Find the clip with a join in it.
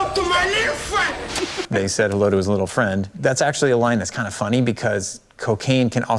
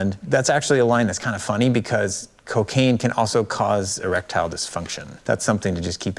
first; 1 cut; at 1.4 s

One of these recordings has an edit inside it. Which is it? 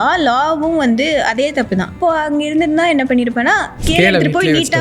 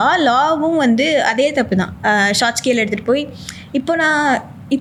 first; 2 cuts; at 2.0 s, 3.7 s

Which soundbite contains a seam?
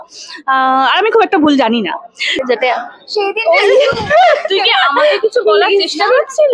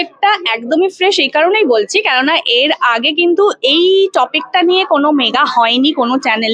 first; 1 cut; at 2.3 s

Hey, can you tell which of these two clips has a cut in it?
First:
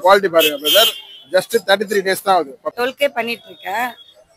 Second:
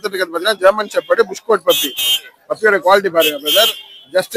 first; 1 cut; at 2.6 s

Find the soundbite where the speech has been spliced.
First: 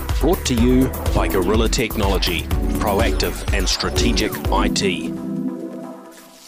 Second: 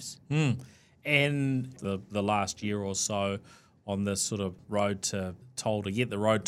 second; 1 cut; at 1.8 s

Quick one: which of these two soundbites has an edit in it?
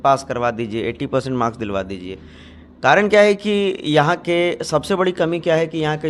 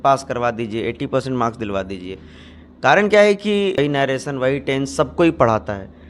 second; 1 cut; at 3.8 s

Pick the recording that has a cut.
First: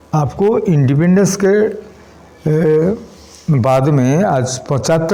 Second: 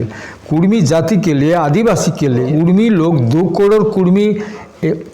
second; 1 cut; at 2.5 s

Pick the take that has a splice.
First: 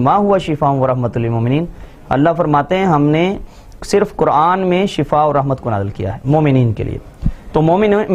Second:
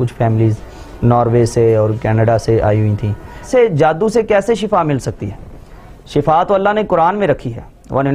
second; 1 cut; at 3.5 s

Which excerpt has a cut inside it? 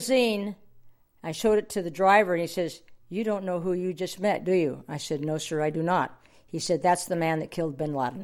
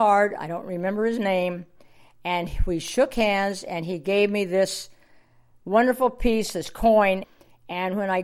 second; 1 cut; at 7.3 s

